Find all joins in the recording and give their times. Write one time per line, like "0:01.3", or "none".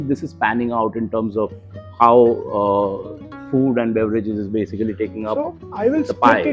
none